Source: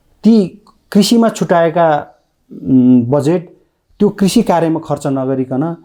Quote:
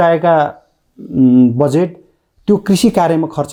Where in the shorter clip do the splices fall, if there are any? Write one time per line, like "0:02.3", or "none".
none